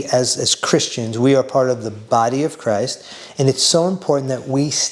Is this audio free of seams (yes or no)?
no